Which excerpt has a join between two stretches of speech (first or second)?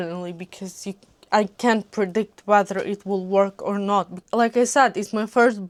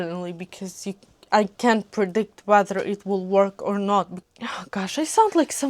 second